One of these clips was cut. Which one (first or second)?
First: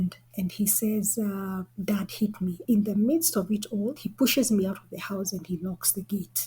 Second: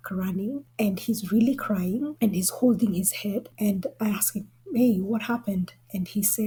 first